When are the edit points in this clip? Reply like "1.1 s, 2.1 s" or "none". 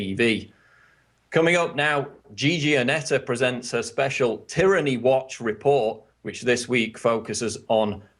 none